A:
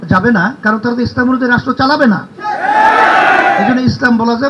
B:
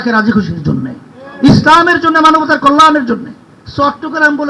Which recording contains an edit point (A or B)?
B